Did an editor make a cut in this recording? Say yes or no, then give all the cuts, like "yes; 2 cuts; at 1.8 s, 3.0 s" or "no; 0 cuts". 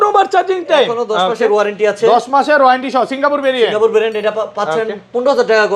no; 0 cuts